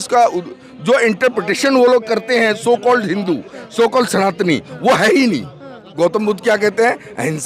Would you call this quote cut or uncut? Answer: cut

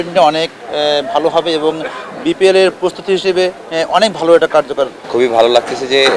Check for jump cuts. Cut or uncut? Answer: cut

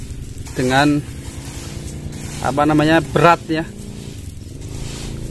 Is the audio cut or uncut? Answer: uncut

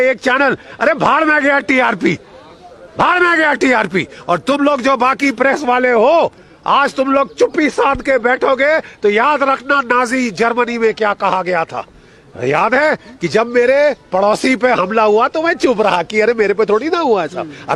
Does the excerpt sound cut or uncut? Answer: uncut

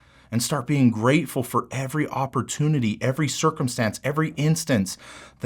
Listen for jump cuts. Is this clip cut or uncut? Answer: uncut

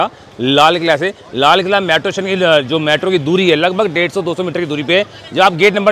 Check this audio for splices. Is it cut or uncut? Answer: uncut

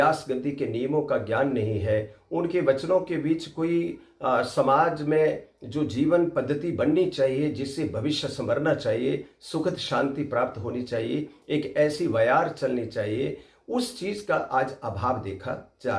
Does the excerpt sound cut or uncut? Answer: uncut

